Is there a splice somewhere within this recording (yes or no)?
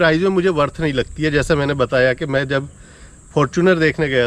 no